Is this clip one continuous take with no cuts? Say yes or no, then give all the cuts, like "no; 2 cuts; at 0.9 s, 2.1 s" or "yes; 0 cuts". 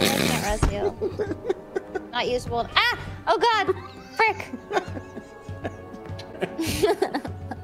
yes; 0 cuts